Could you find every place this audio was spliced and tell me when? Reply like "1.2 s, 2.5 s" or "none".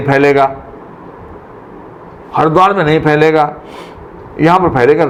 none